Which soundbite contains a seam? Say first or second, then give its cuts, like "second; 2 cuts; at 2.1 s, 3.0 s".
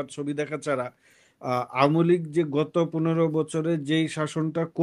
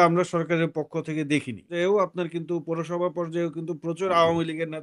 second; 1 cut; at 1.7 s